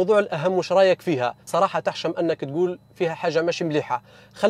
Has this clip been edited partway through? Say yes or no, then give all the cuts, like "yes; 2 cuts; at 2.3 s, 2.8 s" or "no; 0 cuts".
yes; 1 cut; at 1.4 s